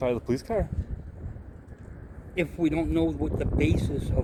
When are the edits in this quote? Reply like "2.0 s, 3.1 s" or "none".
none

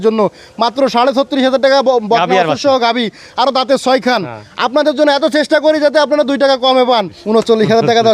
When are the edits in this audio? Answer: 7.2 s

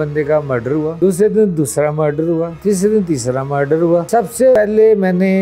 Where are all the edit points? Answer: 1.0 s, 2.5 s, 4.5 s

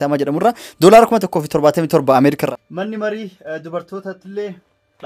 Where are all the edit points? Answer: 2.4 s

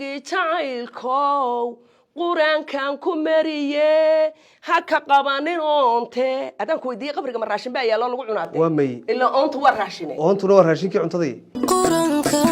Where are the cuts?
11.5 s

